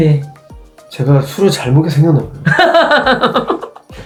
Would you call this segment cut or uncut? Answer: uncut